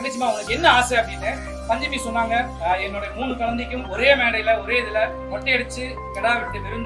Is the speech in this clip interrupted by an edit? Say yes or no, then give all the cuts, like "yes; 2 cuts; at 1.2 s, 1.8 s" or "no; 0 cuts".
yes; 3 cuts; at 2.5 s, 3.8 s, 5.2 s